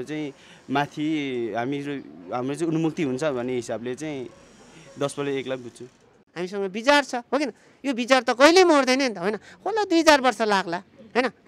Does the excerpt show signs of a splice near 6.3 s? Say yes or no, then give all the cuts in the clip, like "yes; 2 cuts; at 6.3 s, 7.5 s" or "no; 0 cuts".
yes; 1 cut; at 6.3 s